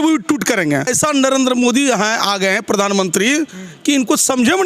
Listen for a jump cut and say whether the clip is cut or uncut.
cut